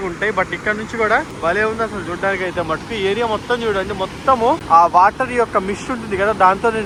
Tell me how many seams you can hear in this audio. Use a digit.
0